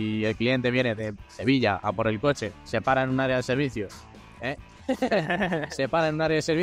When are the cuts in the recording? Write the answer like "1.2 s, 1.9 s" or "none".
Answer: 2.5 s